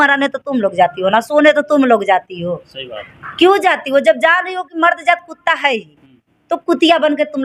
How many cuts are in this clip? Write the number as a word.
zero